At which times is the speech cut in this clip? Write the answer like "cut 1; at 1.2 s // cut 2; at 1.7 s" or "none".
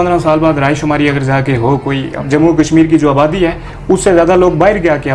cut 1; at 2.1 s